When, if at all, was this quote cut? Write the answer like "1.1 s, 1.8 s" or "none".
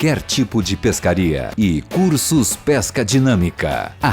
1.3 s